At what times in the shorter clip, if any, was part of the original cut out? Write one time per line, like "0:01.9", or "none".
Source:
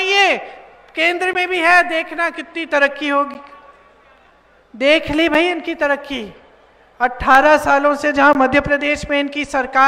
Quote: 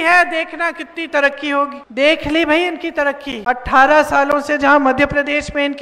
0:01.8
0:03.3